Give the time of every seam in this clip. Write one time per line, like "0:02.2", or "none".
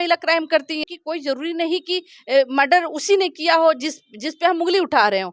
0:00.9